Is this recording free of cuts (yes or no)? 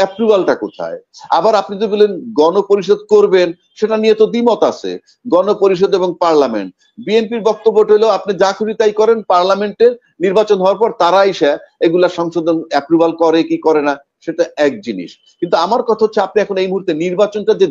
yes